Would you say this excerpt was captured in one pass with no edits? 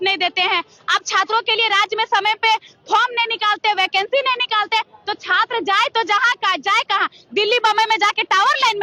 yes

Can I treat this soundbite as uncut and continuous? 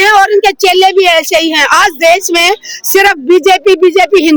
yes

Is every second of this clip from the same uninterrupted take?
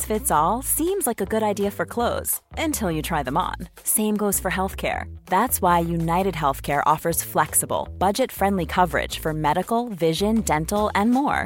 yes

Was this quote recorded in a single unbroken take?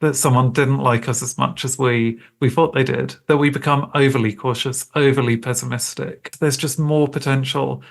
no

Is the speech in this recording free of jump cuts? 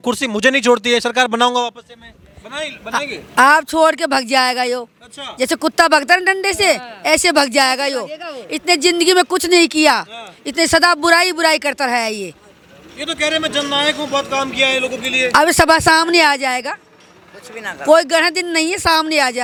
yes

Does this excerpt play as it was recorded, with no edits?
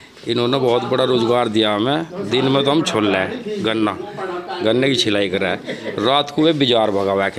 yes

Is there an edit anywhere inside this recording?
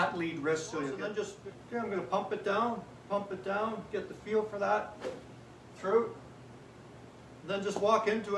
yes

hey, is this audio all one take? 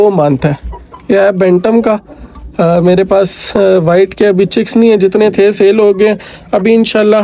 yes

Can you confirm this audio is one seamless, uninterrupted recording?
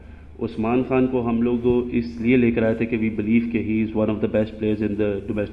yes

